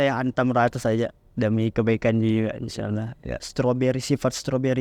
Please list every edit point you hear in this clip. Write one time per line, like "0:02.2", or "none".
0:03.3